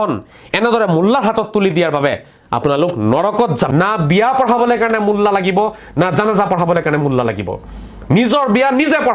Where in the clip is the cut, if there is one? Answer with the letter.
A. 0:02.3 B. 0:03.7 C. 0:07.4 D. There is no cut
B